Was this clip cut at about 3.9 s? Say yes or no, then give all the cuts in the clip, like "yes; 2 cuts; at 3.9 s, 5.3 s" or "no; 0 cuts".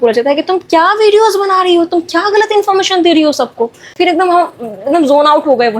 yes; 1 cut; at 3.9 s